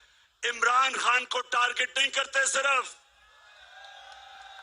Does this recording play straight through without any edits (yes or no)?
yes